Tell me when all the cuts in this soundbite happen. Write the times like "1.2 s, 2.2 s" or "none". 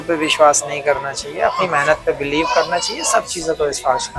none